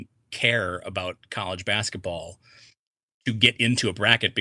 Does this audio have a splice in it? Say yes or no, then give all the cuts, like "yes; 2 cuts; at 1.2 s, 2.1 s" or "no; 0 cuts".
no; 0 cuts